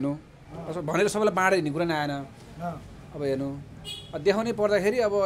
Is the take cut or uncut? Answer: uncut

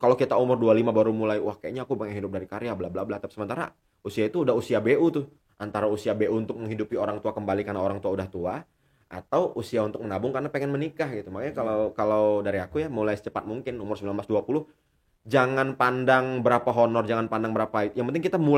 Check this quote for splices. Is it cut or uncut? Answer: uncut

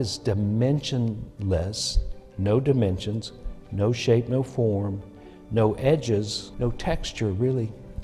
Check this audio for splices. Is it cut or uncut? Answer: cut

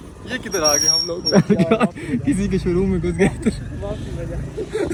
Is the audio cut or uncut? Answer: uncut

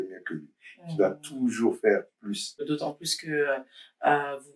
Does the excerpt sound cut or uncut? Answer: cut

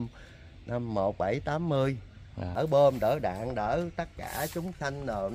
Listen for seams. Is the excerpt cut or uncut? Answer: cut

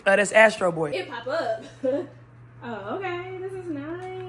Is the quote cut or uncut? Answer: cut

